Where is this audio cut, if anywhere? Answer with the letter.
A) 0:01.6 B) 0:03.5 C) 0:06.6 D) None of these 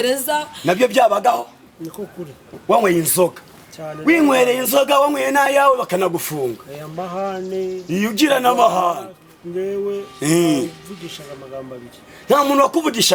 D